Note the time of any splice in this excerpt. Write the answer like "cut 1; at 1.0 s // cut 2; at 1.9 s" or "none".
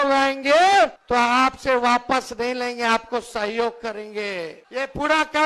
cut 1; at 1.0 s // cut 2; at 4.6 s